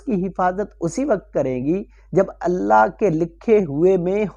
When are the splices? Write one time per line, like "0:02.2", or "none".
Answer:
none